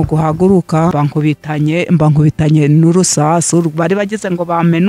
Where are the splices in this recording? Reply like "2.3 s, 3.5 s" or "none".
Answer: 0.9 s